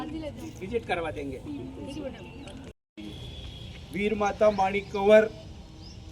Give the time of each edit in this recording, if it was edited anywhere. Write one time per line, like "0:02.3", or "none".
0:02.9